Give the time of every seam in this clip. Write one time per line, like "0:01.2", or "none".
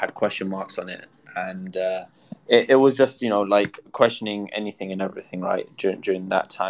none